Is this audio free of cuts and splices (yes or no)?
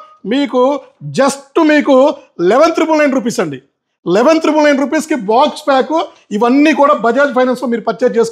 yes